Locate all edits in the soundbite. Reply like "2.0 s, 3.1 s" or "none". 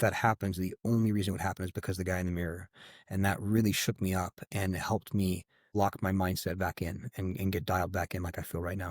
5.7 s